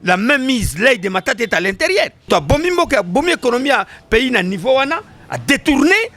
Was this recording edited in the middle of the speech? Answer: yes; 1 cut; at 2.3 s

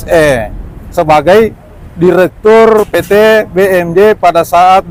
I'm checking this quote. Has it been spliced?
no; 0 cuts

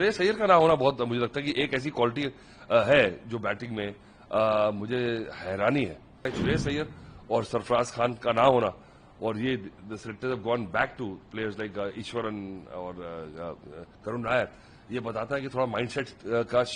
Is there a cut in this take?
yes; 1 cut; at 6.2 s

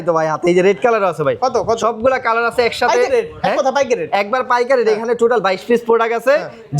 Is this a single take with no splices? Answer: yes; 0 cuts

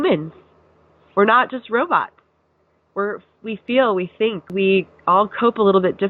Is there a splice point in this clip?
yes; 1 cut; at 4.5 s

